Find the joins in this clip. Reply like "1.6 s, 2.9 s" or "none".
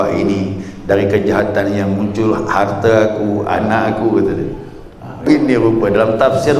5.3 s